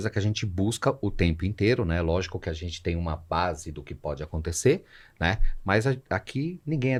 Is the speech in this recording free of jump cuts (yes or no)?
yes